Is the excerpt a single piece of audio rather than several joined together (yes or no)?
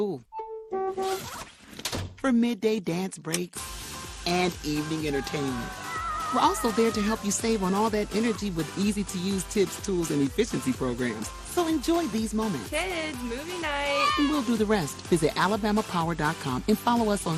yes